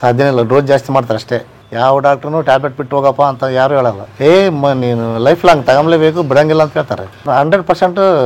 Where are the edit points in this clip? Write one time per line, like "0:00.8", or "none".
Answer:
0:04.1
0:07.2